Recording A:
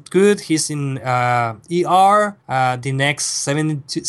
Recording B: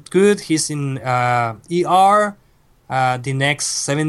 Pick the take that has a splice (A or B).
A